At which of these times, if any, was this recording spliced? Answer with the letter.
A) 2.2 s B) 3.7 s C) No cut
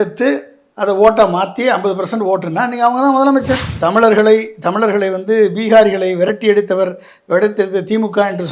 B